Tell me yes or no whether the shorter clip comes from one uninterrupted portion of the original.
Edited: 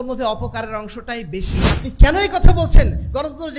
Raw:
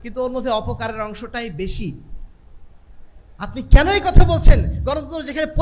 no